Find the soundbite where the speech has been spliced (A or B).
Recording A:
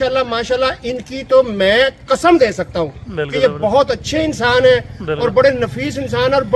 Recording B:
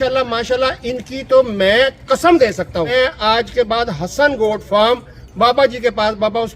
B